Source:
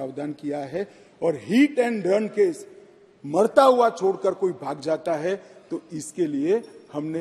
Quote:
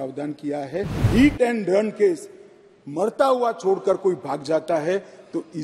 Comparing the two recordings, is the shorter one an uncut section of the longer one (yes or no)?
no